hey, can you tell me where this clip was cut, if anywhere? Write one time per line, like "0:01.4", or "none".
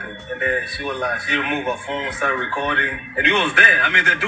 none

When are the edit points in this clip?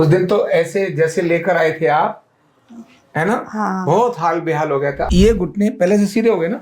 0:05.0

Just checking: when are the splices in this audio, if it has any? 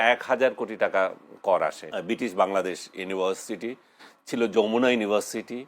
0:01.9

